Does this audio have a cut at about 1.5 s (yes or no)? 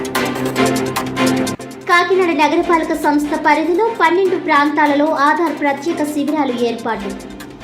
yes